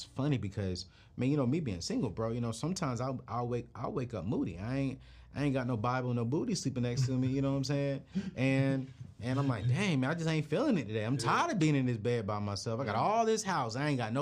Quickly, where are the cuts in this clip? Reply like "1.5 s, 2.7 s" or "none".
none